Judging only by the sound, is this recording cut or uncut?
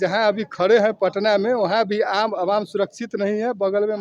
uncut